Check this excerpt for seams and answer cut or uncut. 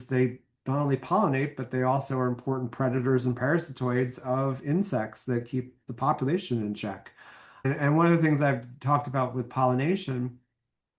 cut